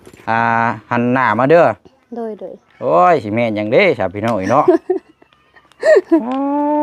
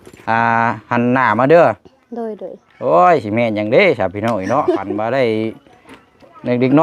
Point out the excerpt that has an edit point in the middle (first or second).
second